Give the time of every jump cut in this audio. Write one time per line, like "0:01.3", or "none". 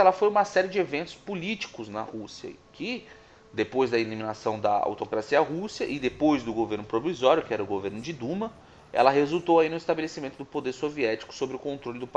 0:03.0